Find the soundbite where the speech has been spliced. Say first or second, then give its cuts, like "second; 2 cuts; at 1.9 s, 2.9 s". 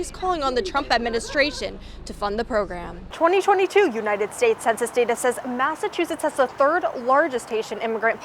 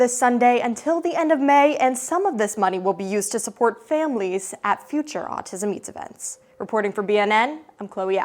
first; 1 cut; at 3.0 s